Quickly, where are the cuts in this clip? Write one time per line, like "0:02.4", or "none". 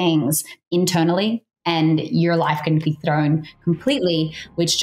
0:02.8